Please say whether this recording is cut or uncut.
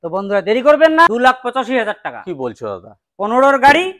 cut